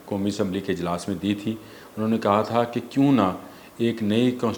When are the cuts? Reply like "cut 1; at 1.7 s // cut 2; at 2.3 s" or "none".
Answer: none